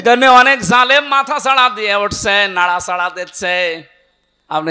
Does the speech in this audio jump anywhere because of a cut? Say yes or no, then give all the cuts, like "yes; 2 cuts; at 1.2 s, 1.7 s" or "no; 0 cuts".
no; 0 cuts